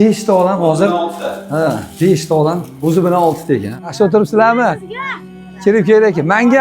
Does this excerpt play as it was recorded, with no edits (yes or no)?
no